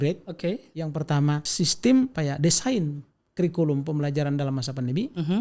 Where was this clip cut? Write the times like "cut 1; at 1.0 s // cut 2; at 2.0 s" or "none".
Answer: cut 1; at 1.5 s // cut 2; at 2.1 s